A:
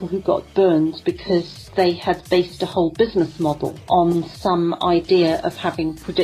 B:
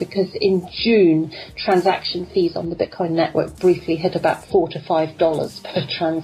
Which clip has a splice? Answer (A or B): A